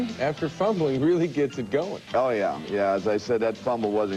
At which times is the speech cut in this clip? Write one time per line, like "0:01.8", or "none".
0:02.6

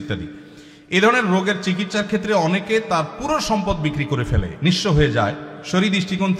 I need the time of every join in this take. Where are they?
none

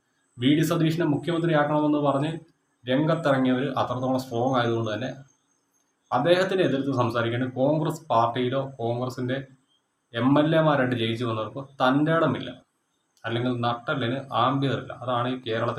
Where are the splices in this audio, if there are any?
none

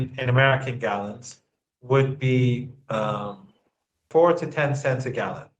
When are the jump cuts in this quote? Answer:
0:04.1

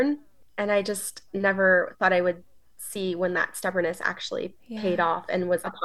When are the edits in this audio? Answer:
none

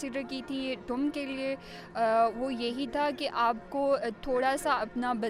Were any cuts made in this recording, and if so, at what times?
none

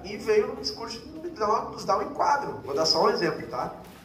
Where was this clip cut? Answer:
0:02.6

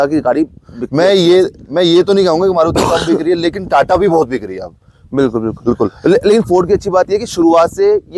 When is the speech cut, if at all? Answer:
none

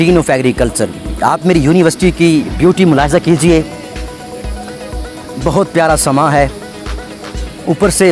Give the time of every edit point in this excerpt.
none

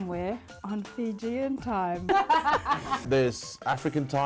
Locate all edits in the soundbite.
0:02.1
0:03.0

